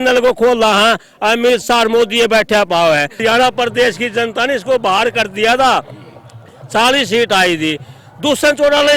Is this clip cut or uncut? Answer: cut